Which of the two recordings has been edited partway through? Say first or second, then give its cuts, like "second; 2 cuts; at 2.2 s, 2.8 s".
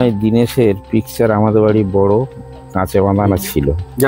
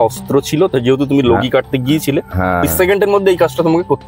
second; 1 cut; at 2.6 s